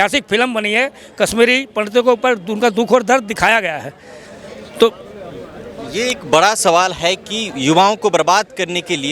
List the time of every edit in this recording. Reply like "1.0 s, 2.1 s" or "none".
none